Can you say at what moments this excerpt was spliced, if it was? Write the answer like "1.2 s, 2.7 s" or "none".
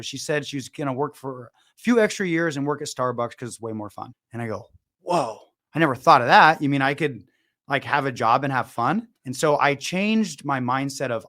9.2 s